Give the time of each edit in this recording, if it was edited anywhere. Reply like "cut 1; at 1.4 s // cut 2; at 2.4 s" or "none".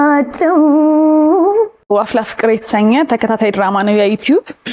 cut 1; at 1.9 s